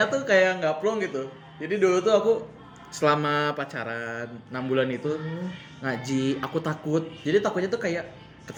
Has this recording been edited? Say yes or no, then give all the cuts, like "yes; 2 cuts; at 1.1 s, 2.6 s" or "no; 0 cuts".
no; 0 cuts